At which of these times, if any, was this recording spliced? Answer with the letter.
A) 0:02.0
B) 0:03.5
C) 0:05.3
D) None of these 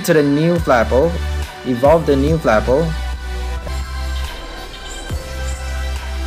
B